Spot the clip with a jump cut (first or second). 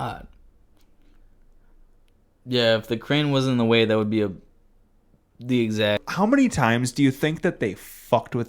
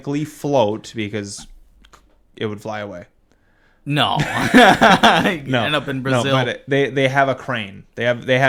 first